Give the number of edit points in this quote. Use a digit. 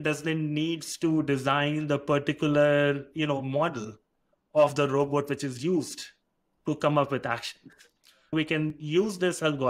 1